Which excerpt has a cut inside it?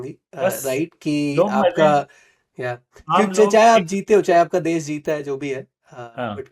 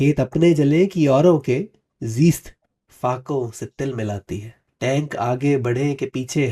second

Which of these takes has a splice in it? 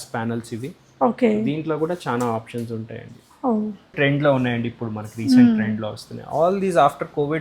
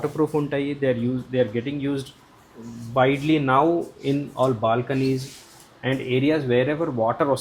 first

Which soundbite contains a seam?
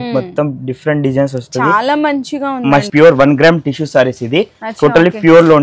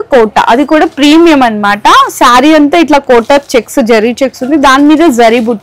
first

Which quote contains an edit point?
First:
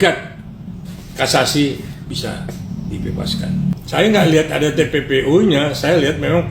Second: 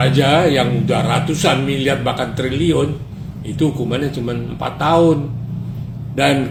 first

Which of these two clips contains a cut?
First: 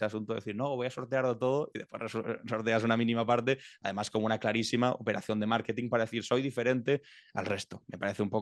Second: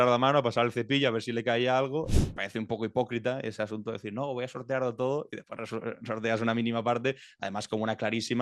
second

